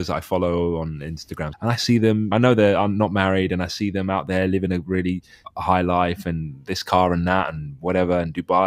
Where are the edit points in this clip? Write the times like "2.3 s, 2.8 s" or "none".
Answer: 1.5 s, 2.3 s, 5.4 s